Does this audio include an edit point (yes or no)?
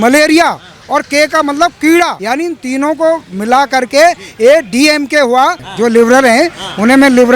yes